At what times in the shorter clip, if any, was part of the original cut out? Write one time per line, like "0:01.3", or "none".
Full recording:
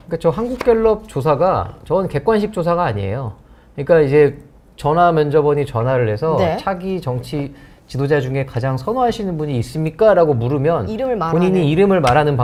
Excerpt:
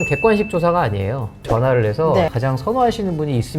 0:01.5
0:02.3

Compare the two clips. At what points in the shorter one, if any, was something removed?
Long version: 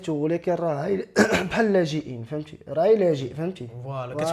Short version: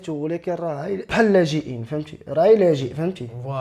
0:01.1

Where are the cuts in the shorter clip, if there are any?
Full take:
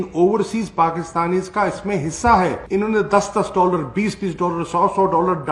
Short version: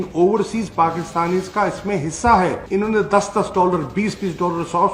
none

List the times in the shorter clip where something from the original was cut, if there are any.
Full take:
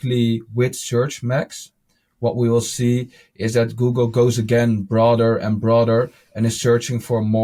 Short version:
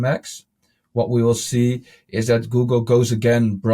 none

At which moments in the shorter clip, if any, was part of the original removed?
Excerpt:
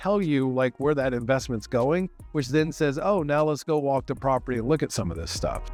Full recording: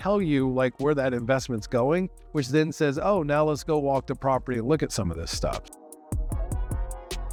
none

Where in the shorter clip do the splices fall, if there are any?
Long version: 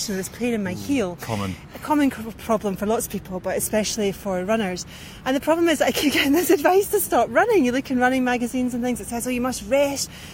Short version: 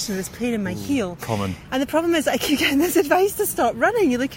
0:01.6

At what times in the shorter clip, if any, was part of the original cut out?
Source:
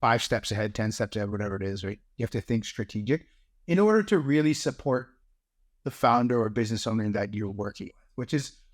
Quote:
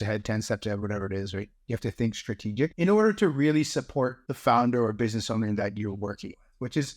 0:02.7
0:04.3

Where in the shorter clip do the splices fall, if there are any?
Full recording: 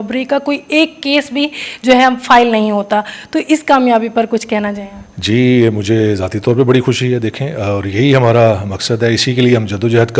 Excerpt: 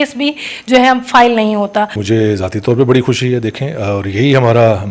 0:02.0

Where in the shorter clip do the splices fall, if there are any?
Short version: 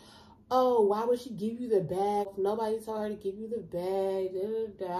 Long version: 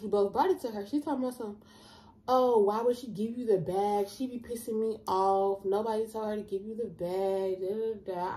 0:02.3

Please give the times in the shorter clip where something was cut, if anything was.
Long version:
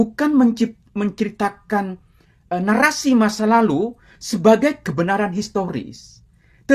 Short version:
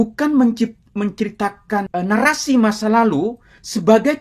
0:01.9

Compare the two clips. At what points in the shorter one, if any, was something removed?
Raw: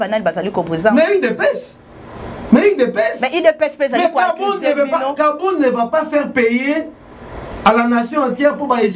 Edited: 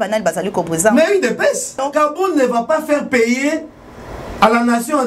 0:01.8

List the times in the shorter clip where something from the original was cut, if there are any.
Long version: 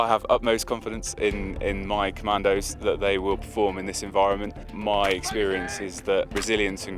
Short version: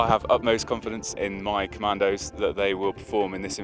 0:01.1

